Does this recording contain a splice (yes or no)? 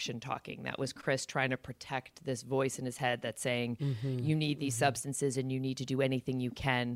no